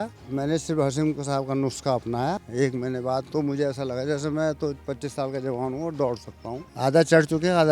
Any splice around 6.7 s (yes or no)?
yes